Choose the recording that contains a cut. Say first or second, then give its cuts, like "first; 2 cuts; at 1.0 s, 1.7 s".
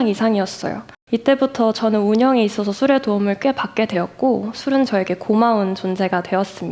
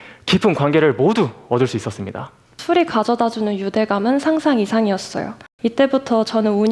second; 1 cut; at 2.5 s